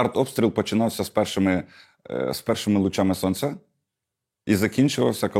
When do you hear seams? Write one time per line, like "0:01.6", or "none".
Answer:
none